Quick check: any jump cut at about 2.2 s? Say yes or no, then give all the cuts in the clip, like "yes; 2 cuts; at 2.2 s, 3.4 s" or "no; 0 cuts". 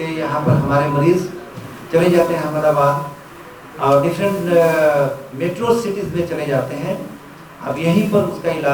no; 0 cuts